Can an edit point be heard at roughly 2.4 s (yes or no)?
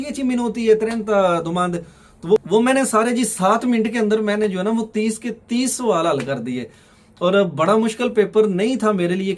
yes